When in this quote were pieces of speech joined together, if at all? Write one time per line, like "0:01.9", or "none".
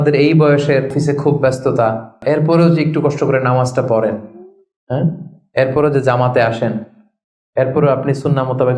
0:00.9
0:02.2

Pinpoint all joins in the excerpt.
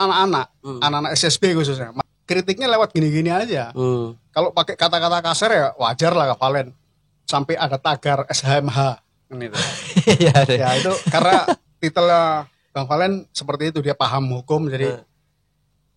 0:01.9

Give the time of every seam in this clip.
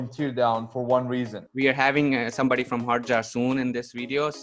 0:01.4

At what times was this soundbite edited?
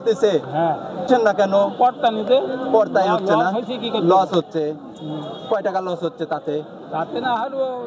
0:01.0

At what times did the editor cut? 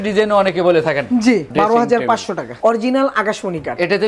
0:01.5
0:02.5

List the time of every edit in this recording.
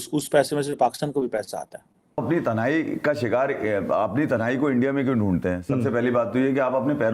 0:02.2

